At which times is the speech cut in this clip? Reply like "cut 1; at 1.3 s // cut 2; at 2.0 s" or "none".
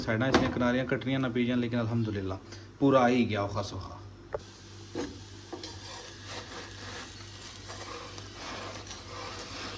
none